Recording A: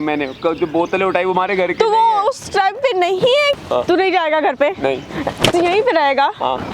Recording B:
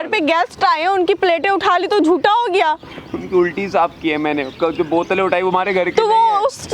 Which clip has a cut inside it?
A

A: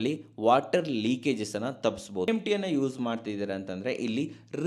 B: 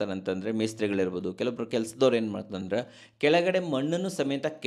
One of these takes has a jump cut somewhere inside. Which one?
A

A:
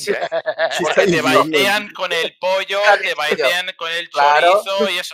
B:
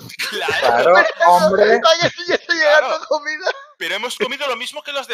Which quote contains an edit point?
B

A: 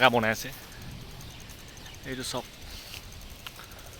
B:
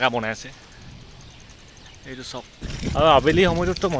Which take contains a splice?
B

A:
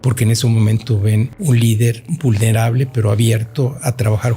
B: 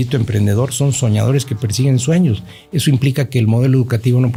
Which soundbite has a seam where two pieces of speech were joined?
A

